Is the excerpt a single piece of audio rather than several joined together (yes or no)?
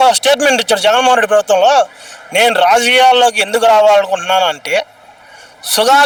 yes